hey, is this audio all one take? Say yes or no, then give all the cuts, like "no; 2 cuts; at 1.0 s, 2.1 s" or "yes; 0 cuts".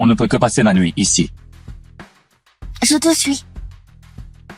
no; 3 cuts; at 1.3 s, 2.7 s, 3.4 s